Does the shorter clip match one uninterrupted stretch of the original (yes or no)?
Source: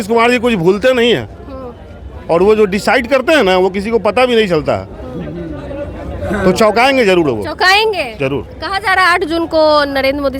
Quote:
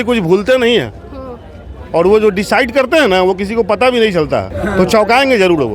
no